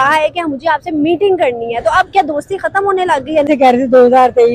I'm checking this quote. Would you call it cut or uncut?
cut